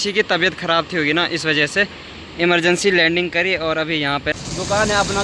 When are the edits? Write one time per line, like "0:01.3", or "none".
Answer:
0:04.3